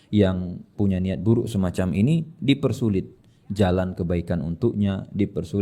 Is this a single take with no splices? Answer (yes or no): yes